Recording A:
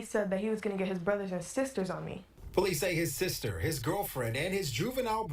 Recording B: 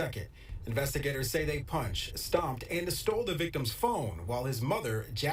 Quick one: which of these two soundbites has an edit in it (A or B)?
A